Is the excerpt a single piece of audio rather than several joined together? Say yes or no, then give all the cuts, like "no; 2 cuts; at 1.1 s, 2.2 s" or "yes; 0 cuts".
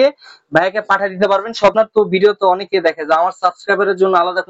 no; 1 cut; at 1.7 s